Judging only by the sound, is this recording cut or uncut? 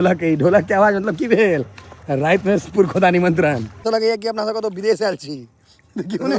cut